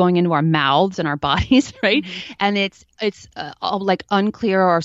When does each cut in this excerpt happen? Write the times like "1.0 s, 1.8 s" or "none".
none